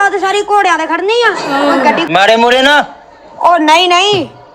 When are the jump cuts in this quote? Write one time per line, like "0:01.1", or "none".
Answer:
0:02.0